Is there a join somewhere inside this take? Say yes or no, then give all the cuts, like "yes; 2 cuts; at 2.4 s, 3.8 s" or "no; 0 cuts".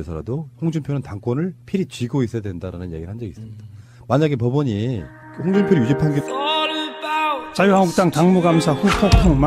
no; 0 cuts